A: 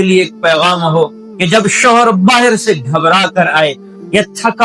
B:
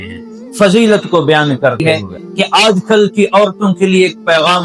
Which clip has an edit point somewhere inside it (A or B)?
B